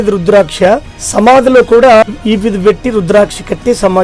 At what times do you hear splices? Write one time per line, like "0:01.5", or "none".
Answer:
0:01.0
0:02.0